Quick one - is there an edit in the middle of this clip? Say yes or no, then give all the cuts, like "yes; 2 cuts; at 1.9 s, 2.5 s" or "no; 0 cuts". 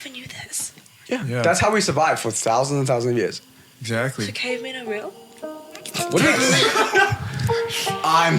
no; 0 cuts